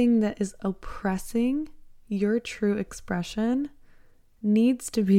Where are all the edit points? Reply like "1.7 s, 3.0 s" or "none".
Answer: none